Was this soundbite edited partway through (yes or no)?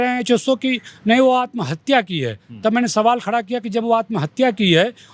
no